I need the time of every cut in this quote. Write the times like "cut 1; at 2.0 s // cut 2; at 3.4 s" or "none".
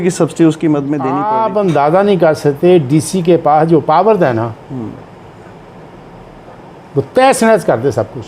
cut 1; at 1.2 s